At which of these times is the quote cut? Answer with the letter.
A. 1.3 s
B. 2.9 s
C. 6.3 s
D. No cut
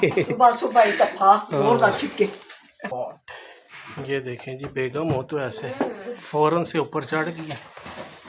B